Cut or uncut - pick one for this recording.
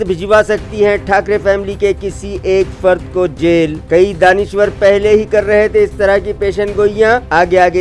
uncut